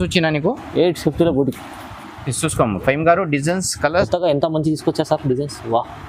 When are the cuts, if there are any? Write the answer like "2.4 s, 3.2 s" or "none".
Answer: 4.1 s